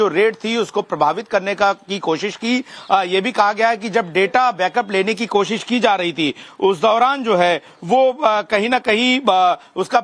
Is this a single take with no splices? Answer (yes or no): no